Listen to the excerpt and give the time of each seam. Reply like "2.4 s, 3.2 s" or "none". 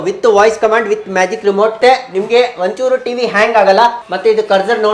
1.8 s, 4.0 s